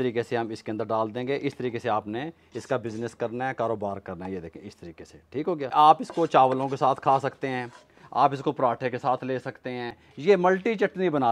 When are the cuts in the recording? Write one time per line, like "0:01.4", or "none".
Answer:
0:05.7
0:10.0